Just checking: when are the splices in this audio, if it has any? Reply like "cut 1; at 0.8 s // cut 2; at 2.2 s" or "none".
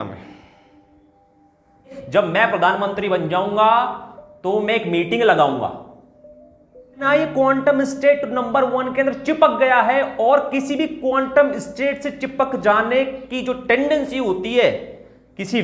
cut 1; at 2.0 s // cut 2; at 7.0 s